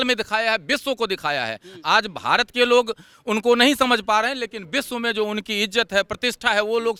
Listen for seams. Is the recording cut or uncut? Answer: uncut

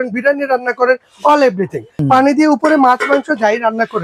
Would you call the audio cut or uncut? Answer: cut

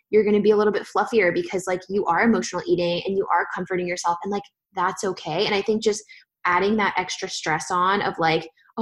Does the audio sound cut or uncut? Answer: uncut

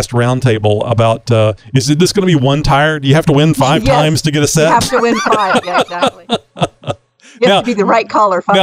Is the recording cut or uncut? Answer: uncut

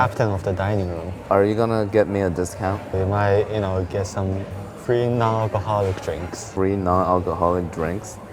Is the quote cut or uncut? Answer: cut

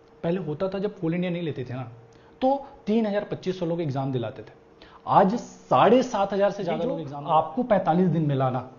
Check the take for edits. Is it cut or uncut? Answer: cut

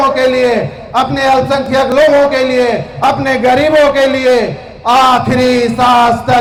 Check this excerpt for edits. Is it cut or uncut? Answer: uncut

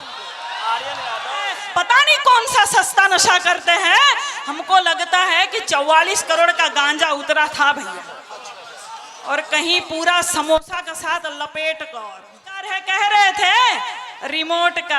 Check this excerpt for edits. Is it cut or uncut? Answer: cut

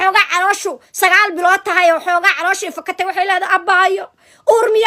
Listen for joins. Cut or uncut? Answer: uncut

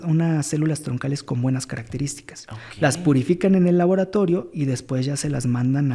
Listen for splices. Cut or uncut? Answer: uncut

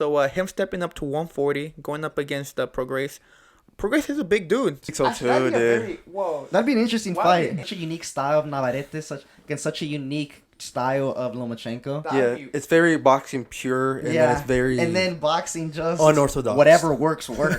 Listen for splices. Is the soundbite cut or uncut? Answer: cut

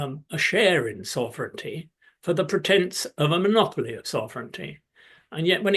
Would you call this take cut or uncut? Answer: uncut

